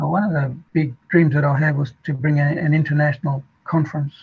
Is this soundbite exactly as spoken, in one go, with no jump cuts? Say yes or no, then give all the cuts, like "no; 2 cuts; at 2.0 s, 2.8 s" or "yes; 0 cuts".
yes; 0 cuts